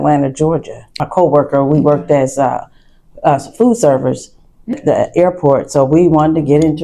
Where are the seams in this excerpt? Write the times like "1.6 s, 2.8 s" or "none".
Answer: 1.0 s, 4.8 s